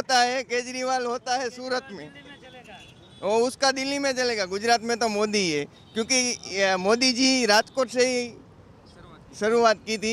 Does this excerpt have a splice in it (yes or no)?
no